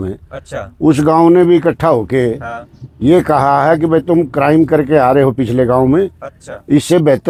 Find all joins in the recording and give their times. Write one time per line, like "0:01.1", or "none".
none